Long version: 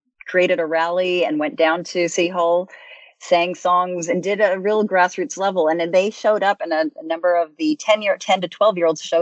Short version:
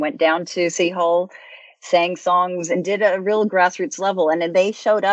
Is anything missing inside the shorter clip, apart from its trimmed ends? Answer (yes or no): no